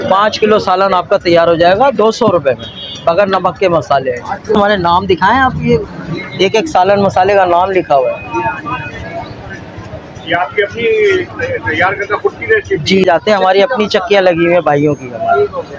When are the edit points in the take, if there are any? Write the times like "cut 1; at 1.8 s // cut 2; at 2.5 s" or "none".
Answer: cut 1; at 4.6 s // cut 2; at 13.0 s